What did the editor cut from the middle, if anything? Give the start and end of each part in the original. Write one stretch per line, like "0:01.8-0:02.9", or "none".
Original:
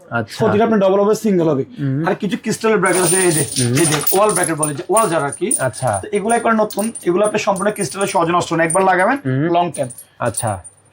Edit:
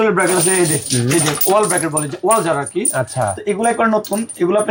none